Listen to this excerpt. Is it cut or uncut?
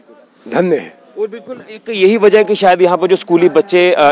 uncut